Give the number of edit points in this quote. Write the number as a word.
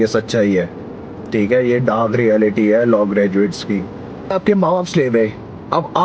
one